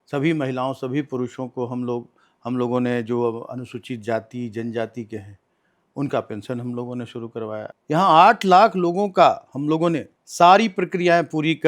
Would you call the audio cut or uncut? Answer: cut